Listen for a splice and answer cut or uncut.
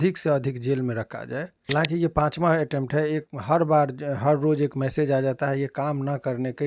cut